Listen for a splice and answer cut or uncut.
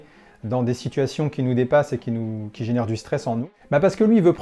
cut